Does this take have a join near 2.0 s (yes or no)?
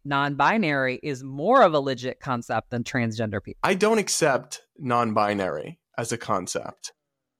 no